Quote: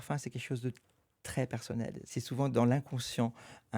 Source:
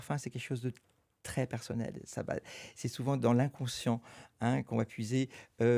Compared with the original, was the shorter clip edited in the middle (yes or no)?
yes